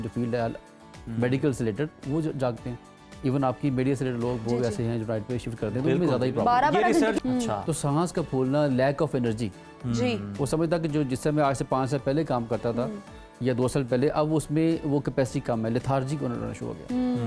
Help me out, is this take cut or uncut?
cut